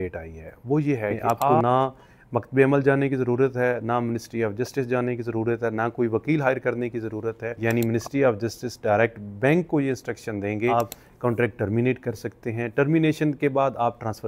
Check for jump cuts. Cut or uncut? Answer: cut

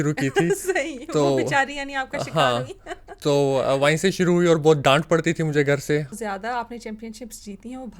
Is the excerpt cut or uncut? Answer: cut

